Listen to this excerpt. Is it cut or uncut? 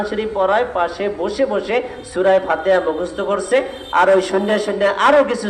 uncut